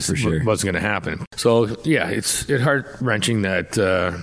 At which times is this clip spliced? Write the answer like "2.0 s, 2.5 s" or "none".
1.1 s